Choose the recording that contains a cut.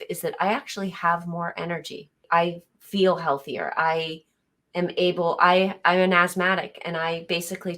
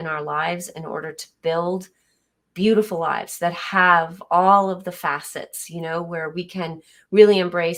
first; 1 cut; at 2.2 s

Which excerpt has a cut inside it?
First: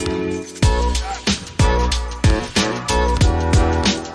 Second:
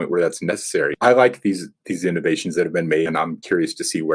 second; 2 cuts; at 0.9 s, 3.1 s

